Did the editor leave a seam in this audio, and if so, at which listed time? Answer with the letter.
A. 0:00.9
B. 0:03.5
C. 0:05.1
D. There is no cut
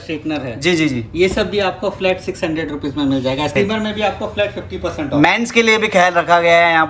B